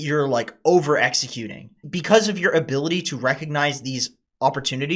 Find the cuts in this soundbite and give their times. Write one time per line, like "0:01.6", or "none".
0:01.8